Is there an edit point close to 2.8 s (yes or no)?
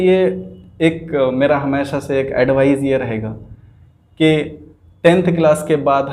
no